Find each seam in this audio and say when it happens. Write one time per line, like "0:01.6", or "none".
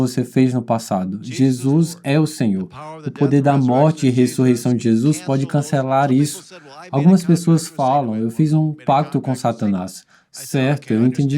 none